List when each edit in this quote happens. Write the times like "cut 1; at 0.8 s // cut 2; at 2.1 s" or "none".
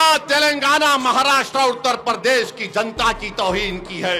none